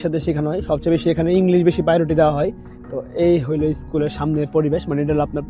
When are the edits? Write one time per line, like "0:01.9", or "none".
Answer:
none

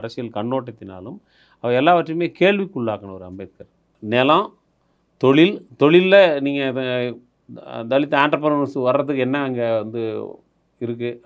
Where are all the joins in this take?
0:03.9

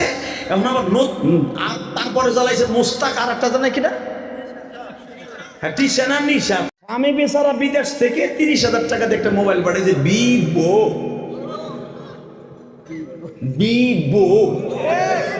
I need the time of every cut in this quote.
0:06.6

